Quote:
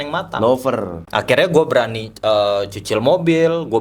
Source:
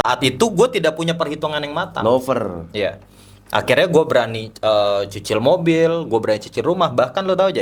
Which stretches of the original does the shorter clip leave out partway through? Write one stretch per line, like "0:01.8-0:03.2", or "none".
0:02.6-0:03.4